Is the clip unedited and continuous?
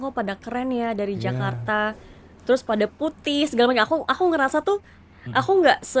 yes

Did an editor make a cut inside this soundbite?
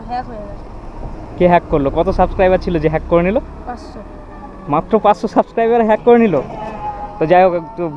no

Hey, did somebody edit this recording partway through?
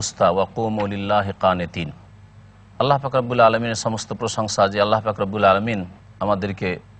yes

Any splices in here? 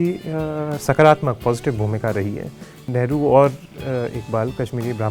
yes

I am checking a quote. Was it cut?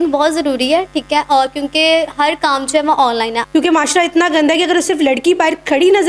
yes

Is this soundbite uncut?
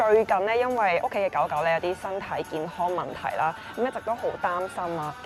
yes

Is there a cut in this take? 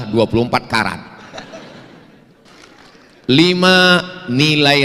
yes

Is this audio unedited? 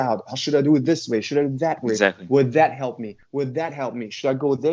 yes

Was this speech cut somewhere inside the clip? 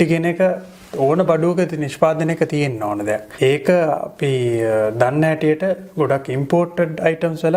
yes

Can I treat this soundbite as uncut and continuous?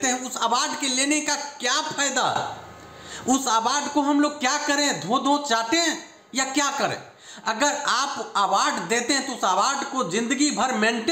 yes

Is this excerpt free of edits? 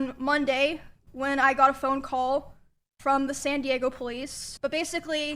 no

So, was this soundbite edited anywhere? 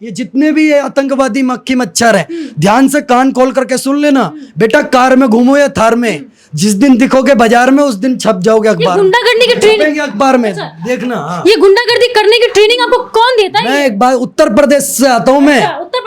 no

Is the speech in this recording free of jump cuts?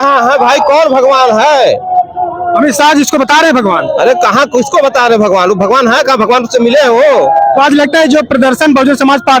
yes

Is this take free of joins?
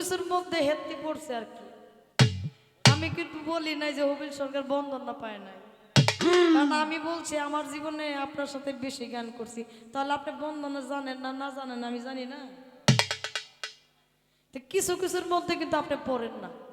yes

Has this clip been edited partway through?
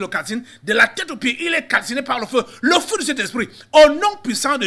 no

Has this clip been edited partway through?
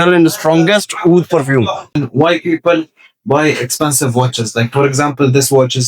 yes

